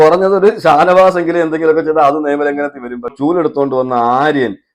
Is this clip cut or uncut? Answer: cut